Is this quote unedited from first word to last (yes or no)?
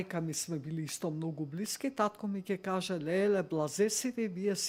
yes